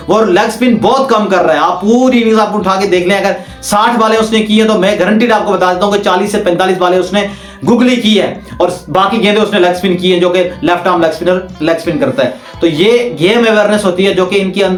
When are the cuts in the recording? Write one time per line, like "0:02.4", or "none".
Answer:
none